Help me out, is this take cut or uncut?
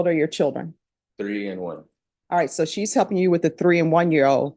uncut